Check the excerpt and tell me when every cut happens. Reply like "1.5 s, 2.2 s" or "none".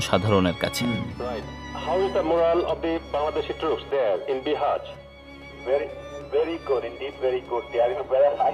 1.0 s